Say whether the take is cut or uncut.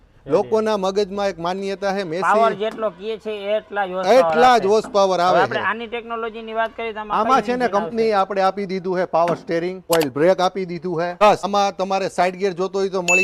uncut